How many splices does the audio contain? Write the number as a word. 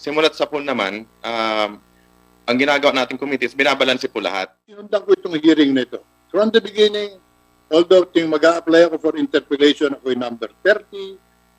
one